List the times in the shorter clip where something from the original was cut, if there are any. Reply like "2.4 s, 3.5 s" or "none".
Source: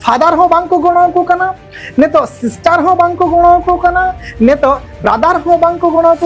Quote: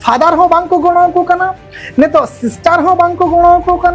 none